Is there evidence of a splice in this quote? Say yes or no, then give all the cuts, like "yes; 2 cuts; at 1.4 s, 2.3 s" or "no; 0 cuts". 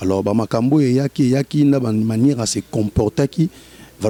no; 0 cuts